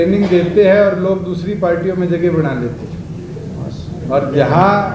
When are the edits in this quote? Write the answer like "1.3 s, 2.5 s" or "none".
none

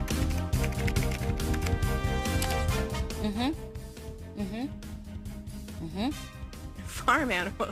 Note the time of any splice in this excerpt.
0.9 s

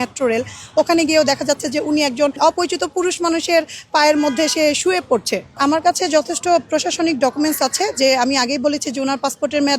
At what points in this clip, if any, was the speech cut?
2.4 s, 5.5 s

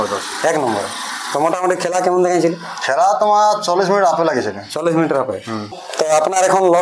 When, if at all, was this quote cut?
5.8 s

